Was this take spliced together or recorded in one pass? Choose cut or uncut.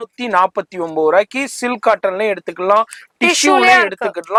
uncut